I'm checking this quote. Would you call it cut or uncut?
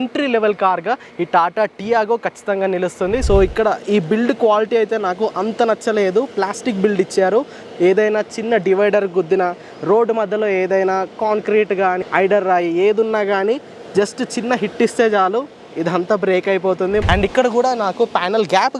cut